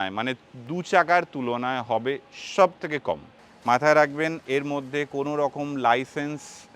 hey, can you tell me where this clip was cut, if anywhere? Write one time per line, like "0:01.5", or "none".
0:03.3
0:04.4